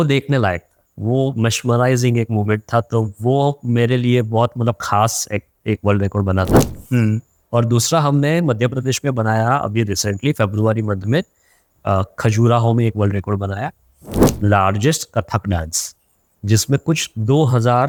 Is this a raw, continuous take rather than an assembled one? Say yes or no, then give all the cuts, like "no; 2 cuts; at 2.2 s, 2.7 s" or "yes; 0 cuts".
yes; 0 cuts